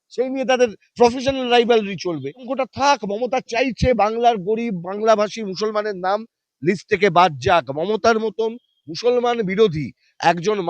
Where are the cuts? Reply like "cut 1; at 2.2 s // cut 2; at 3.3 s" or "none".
cut 1; at 2.8 s